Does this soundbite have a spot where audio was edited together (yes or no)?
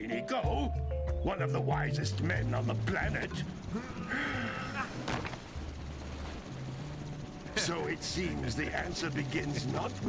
no